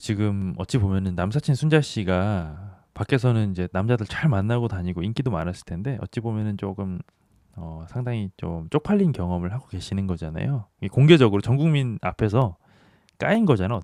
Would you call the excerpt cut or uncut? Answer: uncut